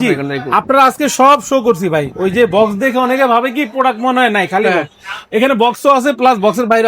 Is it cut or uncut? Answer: uncut